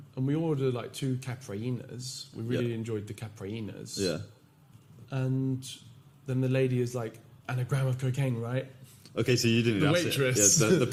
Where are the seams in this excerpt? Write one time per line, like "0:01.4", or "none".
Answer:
none